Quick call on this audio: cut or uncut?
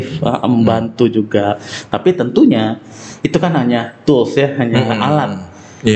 uncut